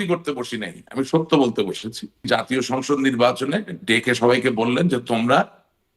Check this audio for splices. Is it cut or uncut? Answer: cut